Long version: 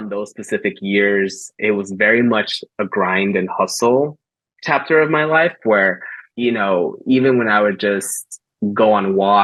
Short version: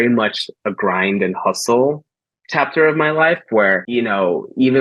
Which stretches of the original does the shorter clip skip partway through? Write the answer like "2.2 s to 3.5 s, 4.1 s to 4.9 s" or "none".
6.0 s to 6.3 s